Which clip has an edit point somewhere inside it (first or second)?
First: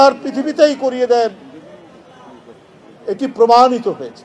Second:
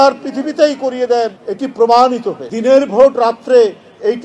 second